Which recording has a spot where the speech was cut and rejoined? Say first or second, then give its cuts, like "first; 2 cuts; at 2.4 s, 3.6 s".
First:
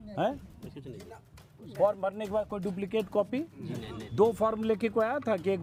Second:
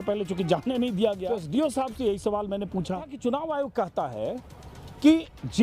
second; 2 cuts; at 1.5 s, 3.1 s